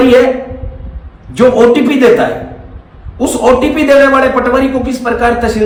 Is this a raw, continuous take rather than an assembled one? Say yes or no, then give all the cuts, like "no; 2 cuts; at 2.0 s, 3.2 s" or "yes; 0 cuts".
yes; 0 cuts